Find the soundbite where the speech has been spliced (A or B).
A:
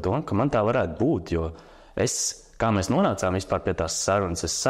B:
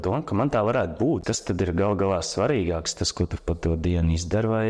B